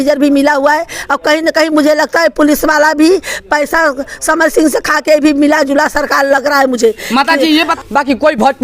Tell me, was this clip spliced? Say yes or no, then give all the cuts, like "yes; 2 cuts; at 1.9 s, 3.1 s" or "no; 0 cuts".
yes; 1 cut; at 7.7 s